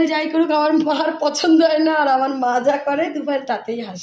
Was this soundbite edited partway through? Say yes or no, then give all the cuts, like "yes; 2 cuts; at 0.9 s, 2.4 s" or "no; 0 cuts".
no; 0 cuts